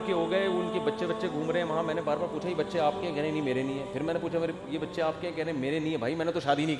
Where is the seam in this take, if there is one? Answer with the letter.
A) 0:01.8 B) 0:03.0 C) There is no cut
C